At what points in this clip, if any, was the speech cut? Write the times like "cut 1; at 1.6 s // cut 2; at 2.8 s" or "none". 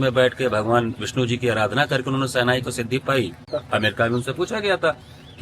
cut 1; at 3.5 s